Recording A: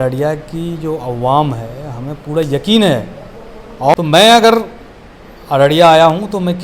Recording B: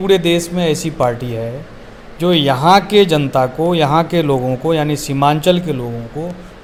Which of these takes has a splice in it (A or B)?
A